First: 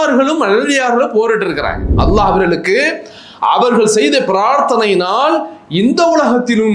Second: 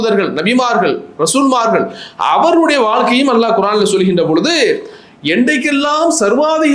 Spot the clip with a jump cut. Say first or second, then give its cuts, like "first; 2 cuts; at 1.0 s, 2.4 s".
first; 1 cut; at 1.9 s